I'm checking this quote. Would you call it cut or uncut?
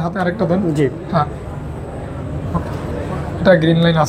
uncut